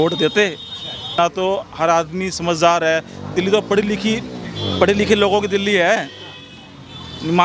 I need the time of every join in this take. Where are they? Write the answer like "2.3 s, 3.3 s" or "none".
1.2 s